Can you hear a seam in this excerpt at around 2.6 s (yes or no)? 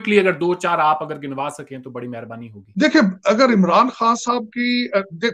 yes